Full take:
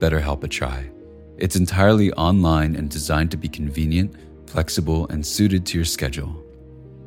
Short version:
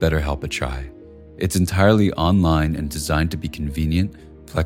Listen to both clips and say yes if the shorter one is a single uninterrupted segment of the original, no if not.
yes